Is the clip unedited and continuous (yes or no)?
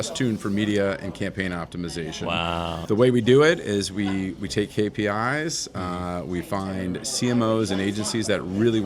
no